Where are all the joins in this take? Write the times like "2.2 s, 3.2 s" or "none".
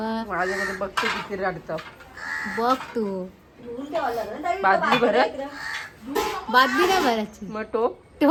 none